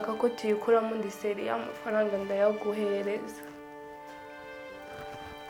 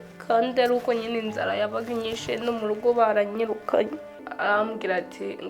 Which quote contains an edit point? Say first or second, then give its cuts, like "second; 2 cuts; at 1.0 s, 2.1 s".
second; 1 cut; at 4.2 s